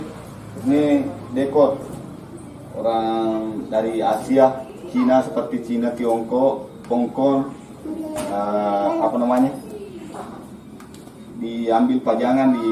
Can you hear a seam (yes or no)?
no